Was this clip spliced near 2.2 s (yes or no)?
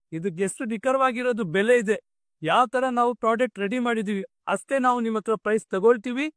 no